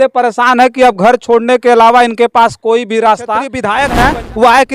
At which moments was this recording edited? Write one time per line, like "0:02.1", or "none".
0:03.6